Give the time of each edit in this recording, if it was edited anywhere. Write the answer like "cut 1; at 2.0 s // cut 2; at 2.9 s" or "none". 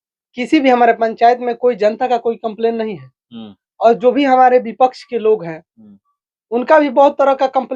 none

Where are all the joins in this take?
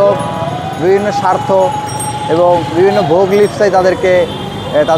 none

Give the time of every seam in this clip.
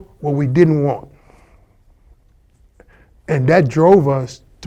none

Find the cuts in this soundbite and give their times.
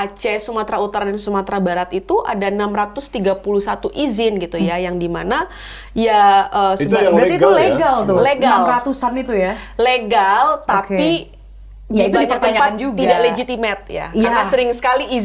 none

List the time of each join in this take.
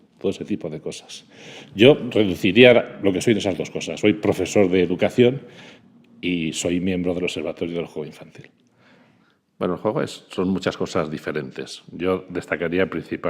cut 1; at 10.2 s

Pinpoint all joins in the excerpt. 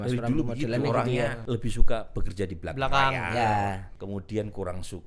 cut 1; at 1.4 s // cut 2; at 3.9 s

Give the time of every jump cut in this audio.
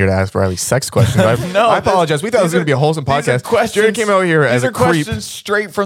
none

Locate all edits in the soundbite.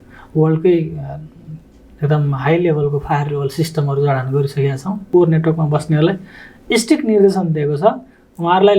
cut 1; at 5.0 s

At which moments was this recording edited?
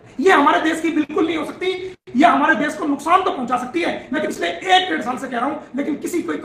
cut 1; at 4.3 s

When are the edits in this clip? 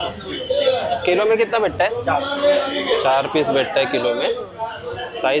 none

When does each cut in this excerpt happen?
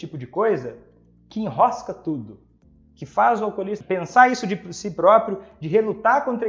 cut 1; at 3.8 s

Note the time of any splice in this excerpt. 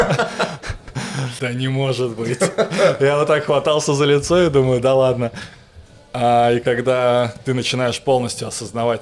cut 1; at 1.3 s

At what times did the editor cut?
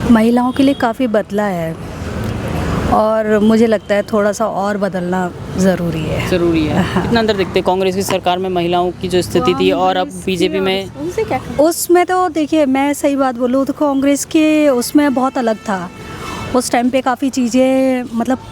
none

